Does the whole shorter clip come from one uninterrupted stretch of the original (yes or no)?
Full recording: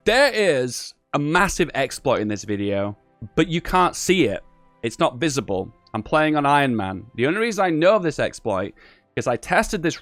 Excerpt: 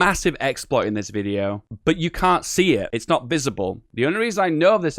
no